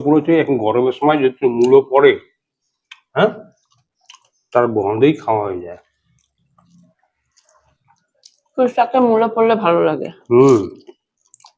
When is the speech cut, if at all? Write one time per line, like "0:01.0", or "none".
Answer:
0:07.8